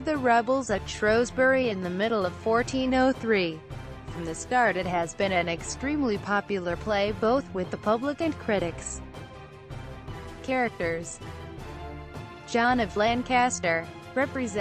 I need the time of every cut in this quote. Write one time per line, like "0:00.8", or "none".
0:13.4